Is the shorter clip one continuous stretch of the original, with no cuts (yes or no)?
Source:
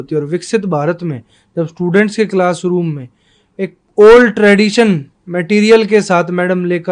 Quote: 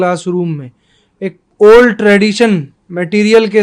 yes